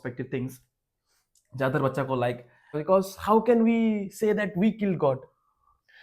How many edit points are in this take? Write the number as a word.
one